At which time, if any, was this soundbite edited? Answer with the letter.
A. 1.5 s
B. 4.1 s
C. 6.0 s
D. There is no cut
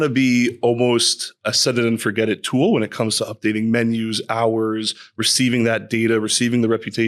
A